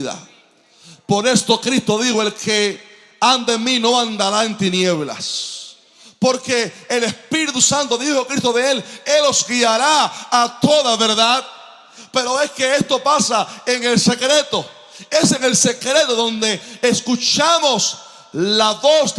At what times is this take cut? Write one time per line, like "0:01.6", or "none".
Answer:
none